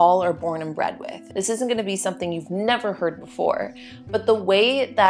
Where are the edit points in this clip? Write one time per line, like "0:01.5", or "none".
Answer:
0:01.2